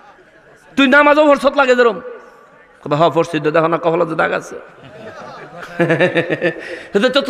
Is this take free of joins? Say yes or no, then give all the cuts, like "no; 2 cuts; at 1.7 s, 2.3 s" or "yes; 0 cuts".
yes; 0 cuts